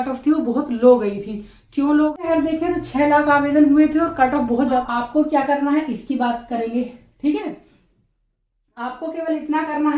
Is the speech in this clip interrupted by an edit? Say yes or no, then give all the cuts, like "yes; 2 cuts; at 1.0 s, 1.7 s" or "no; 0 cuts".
yes; 2 cuts; at 2.2 s, 4.8 s